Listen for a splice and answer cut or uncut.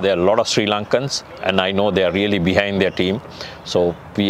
uncut